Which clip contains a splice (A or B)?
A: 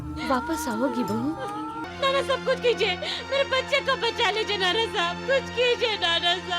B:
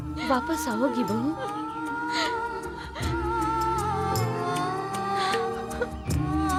A